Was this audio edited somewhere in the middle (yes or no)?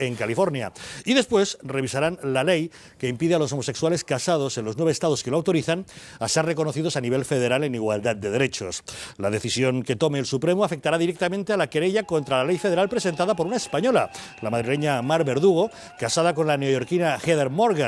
no